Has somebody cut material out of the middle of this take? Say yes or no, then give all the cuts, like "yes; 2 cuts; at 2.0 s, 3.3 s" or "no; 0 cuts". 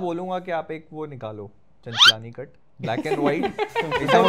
no; 0 cuts